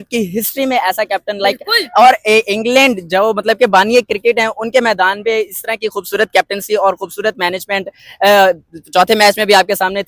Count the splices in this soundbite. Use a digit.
0